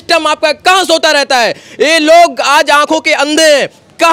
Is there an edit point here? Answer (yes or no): no